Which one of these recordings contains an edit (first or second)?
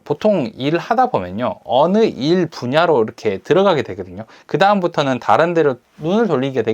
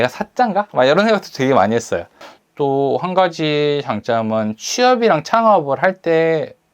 second